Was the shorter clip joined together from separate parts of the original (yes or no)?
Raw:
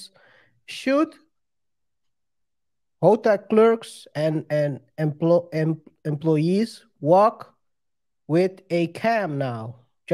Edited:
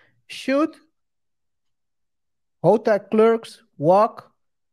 yes